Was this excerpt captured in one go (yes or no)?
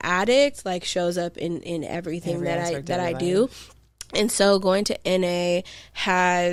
yes